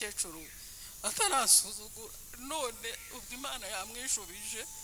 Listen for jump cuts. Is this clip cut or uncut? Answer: uncut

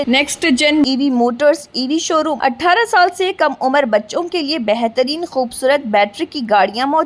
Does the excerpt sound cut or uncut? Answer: cut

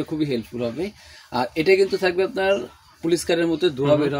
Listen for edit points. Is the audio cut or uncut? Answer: uncut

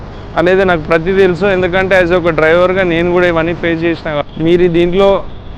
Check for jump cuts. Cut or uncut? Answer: cut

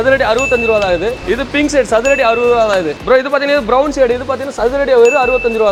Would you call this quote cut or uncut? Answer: uncut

